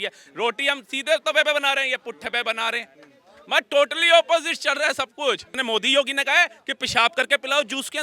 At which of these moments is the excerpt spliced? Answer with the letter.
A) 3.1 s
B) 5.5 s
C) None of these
B